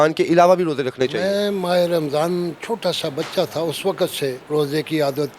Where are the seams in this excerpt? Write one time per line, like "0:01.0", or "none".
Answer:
0:04.4